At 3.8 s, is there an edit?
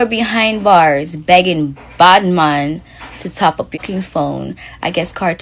yes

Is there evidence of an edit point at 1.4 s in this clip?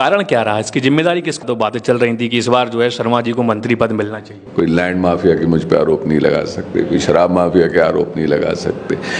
yes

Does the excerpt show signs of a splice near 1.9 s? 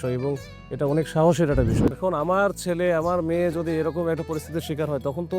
yes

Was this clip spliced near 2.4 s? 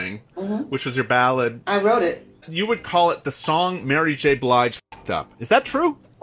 no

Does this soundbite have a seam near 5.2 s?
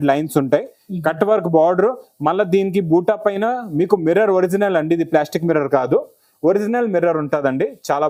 no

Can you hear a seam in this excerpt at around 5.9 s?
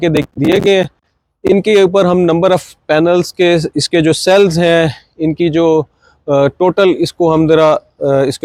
no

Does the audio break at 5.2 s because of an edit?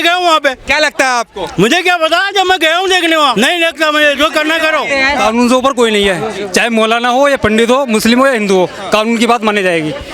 yes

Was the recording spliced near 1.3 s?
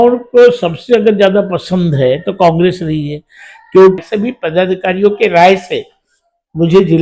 no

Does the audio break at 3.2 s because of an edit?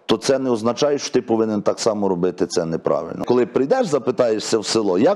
yes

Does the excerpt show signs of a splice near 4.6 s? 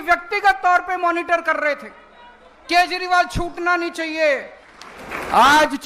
yes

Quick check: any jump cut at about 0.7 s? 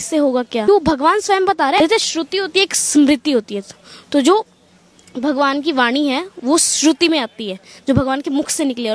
yes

